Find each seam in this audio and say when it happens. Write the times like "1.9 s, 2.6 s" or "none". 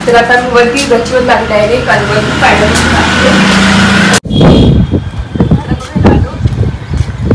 4.2 s